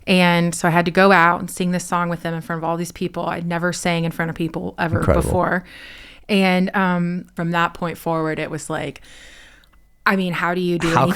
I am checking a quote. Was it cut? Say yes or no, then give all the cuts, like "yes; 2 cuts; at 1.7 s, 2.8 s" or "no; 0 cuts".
yes; 1 cut; at 7.3 s